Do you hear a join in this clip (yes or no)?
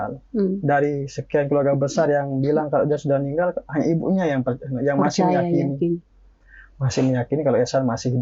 no